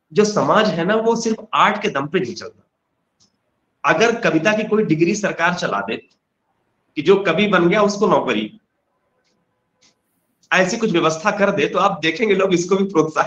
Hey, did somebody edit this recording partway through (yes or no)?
no